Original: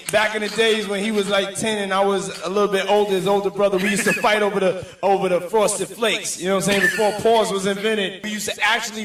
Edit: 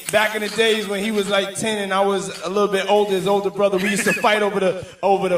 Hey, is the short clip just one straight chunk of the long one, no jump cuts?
yes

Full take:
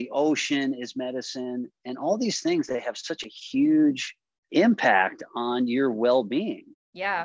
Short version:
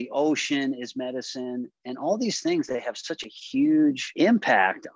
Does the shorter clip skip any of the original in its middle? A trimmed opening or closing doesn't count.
yes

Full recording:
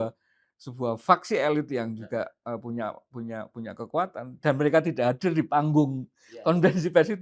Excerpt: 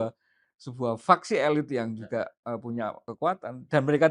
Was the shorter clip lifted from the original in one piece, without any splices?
no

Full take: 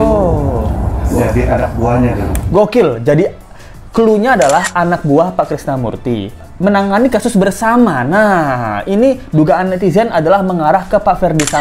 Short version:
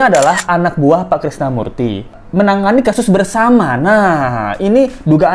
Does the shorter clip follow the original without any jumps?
yes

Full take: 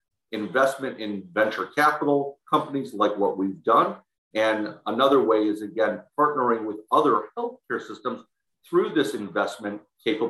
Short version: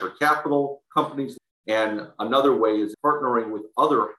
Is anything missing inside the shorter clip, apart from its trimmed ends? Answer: yes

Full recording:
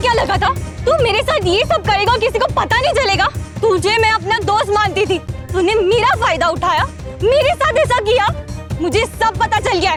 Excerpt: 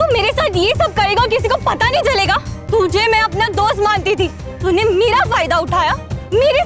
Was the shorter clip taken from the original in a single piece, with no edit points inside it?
yes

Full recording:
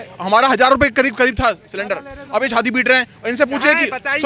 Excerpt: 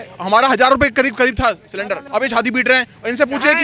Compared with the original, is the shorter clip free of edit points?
no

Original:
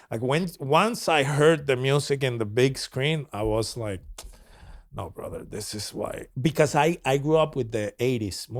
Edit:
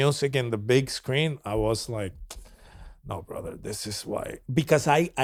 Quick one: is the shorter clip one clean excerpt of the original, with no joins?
yes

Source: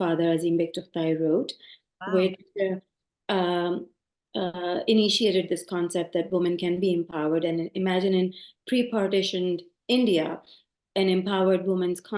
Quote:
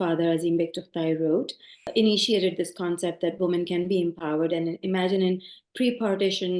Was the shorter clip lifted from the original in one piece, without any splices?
no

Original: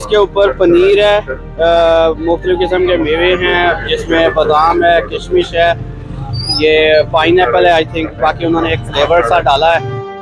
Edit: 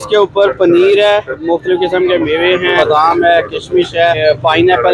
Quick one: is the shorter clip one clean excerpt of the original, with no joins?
no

